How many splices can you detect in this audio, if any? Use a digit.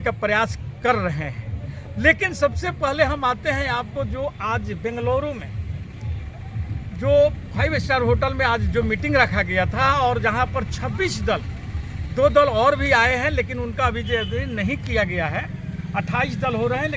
0